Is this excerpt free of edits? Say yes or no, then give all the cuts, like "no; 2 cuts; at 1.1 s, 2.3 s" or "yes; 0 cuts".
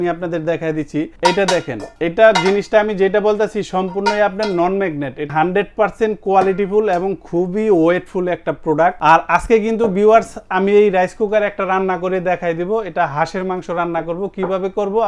no; 4 cuts; at 1.1 s, 1.8 s, 5.3 s, 9.0 s